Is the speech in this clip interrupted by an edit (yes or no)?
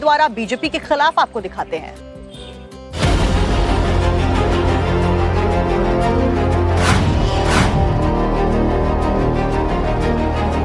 yes